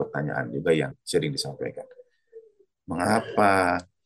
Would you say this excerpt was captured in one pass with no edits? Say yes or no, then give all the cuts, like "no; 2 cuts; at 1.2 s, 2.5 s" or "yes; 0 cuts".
no; 1 cut; at 1.0 s